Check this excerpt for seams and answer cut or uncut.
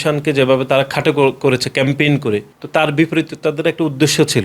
uncut